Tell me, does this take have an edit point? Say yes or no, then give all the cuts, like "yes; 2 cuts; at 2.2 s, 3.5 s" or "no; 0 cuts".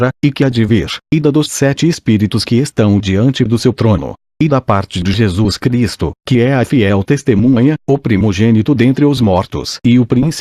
yes; 1 cut; at 0.9 s